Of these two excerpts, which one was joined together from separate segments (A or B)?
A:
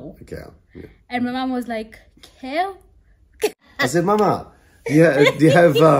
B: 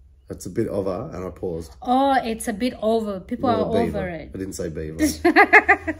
A